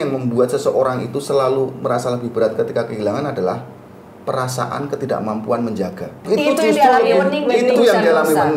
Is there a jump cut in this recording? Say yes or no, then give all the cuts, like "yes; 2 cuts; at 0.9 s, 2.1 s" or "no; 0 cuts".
yes; 1 cut; at 6.2 s